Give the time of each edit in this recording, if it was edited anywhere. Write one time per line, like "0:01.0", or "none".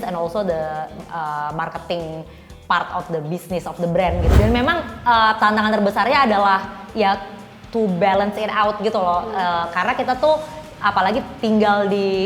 0:04.3